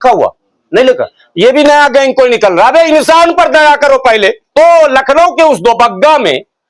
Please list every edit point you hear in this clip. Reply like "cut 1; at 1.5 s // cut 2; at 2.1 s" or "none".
cut 1; at 4.4 s